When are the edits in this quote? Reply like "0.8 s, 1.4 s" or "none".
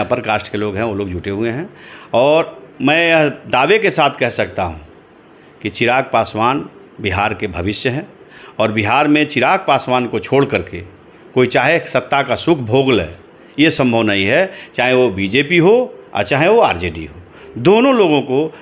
none